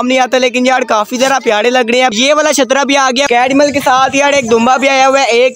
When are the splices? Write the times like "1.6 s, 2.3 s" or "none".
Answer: 2.1 s, 3.2 s